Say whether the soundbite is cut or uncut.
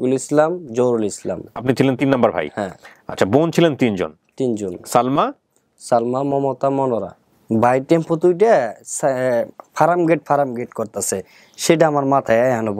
cut